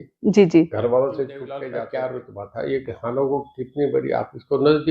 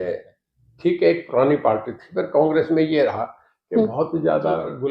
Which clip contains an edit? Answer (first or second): first